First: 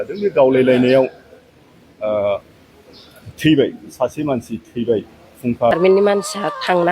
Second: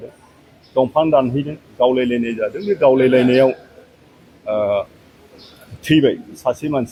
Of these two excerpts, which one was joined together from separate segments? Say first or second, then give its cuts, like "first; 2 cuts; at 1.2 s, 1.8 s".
first; 1 cut; at 5.7 s